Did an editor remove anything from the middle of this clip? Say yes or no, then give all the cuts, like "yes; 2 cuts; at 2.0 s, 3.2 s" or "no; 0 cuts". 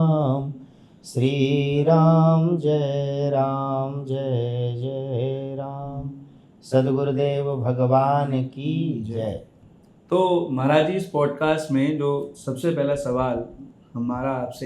no; 0 cuts